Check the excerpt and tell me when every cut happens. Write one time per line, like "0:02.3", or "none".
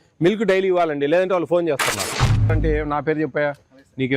0:02.5

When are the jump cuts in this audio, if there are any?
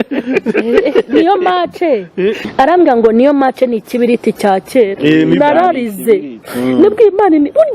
0:02.5

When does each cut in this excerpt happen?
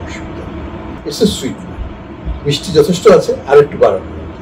0:01.0

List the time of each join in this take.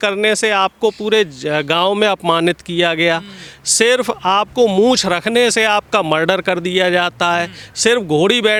none

